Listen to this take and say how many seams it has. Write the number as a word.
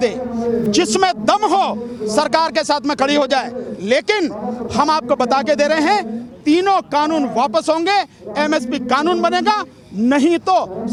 zero